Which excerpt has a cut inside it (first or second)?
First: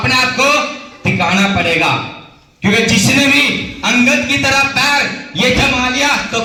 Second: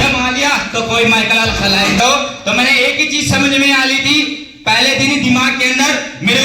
second